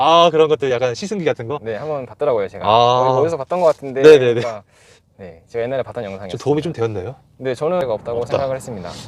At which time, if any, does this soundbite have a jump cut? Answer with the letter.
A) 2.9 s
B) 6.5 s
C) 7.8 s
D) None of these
C